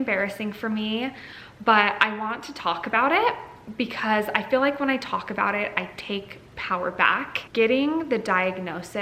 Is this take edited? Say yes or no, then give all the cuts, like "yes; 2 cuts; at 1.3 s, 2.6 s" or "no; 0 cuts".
yes; 1 cut; at 7.4 s